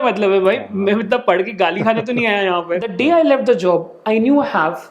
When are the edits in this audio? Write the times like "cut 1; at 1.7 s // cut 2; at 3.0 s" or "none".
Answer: cut 1; at 2.9 s